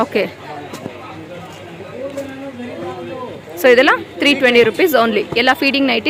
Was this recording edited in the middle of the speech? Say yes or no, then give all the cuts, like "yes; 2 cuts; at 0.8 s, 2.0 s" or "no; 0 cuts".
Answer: no; 0 cuts